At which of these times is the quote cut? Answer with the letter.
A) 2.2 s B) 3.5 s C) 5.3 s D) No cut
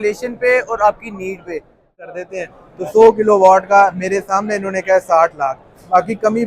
A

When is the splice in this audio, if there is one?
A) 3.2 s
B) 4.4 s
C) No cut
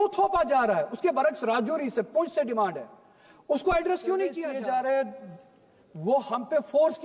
B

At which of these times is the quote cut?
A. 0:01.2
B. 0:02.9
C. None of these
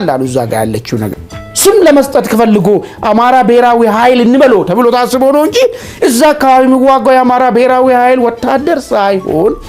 A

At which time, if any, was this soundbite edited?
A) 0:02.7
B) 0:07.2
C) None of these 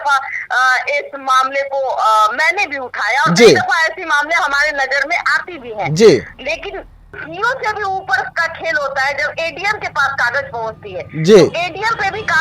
B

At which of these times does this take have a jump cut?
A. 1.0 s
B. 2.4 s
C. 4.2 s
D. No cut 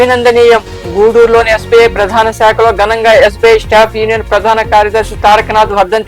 D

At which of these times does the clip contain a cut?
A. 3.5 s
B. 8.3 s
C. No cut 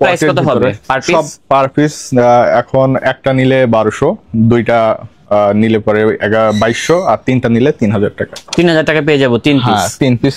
C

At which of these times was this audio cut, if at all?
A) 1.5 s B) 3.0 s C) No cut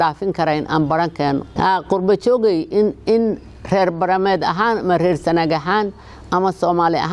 A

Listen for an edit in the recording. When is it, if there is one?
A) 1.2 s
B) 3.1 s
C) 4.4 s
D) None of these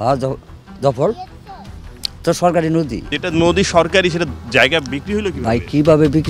B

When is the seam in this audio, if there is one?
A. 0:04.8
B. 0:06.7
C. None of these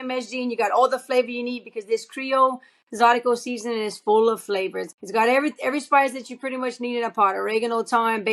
A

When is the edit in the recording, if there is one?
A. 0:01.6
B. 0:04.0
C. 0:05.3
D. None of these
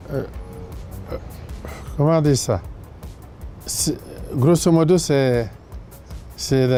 D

